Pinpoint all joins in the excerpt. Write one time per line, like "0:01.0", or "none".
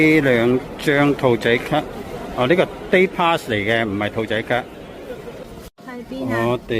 0:05.4